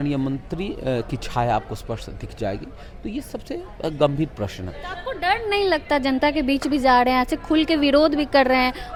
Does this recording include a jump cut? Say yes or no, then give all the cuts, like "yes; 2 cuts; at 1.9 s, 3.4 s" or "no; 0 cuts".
no; 0 cuts